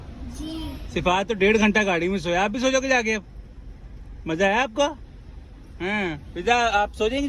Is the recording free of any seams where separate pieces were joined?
yes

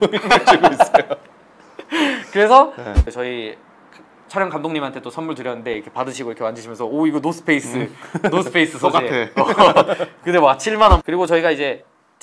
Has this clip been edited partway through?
yes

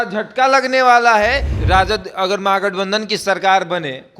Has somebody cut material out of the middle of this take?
yes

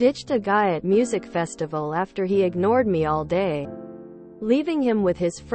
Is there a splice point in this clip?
no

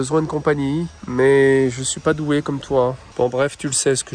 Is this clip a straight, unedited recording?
no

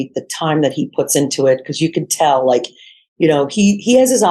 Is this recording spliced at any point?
no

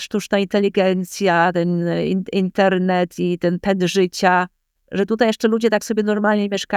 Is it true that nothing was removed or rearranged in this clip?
yes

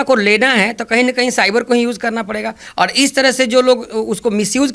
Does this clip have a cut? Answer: no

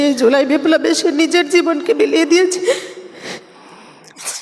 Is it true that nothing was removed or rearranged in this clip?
yes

